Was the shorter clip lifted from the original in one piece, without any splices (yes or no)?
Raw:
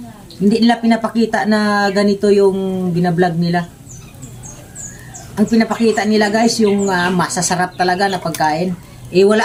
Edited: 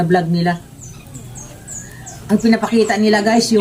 yes